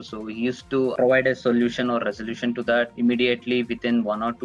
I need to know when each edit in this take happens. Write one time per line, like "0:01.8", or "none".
0:00.9
0:02.9